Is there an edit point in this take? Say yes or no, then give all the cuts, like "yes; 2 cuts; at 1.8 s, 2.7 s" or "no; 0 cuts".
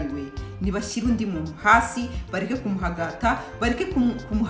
no; 0 cuts